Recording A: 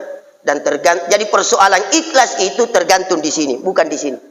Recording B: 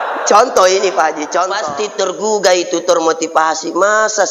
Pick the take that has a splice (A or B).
B